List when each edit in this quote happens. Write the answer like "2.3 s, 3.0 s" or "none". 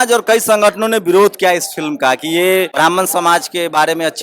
2.7 s